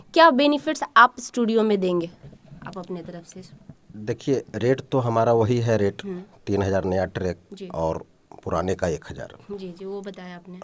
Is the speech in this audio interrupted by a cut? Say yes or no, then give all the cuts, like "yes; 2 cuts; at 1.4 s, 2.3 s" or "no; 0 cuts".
no; 0 cuts